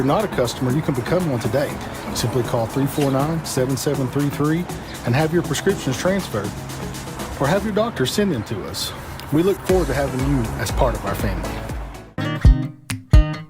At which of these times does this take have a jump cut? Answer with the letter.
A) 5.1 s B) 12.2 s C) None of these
B